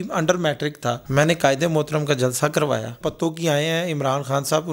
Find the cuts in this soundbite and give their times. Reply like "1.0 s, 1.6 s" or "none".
1.0 s, 3.0 s